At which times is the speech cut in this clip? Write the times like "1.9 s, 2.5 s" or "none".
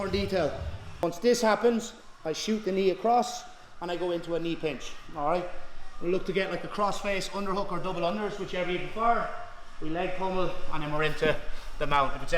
1.0 s

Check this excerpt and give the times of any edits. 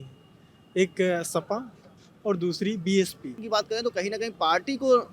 3.4 s

